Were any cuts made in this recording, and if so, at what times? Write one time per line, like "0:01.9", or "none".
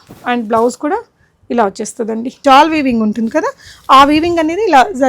0:02.4